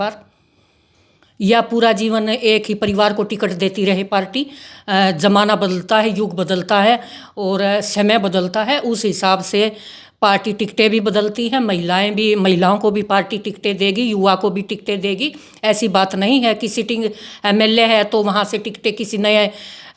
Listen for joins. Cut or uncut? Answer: uncut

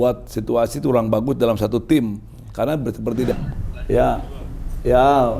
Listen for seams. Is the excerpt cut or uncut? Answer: cut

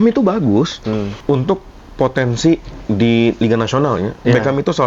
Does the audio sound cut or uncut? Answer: cut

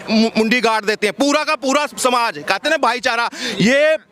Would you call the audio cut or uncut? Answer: uncut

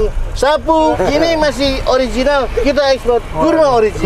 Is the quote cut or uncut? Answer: cut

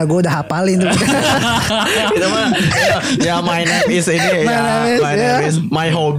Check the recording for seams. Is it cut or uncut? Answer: uncut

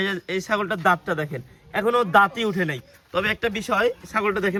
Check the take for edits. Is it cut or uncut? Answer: uncut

